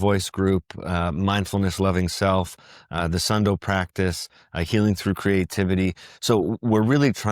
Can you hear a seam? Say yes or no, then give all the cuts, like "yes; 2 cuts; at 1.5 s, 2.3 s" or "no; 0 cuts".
no; 0 cuts